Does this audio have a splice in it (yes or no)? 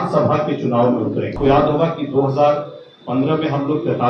yes